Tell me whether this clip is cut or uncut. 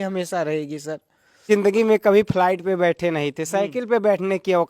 cut